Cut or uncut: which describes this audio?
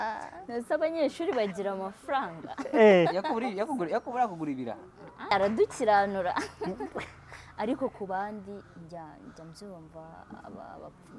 cut